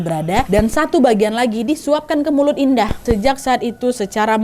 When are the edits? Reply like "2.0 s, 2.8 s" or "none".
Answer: 3.0 s